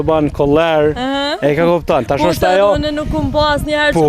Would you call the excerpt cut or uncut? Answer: uncut